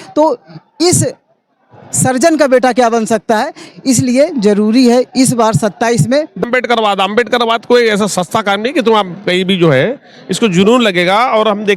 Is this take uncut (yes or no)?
no